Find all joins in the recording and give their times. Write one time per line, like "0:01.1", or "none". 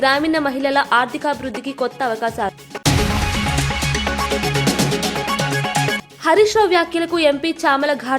0:02.7